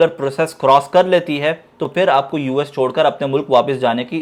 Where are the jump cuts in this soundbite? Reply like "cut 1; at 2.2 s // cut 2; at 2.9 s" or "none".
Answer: none